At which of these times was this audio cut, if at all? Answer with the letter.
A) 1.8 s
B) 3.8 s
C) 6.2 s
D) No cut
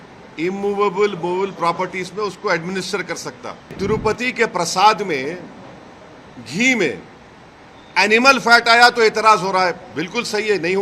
B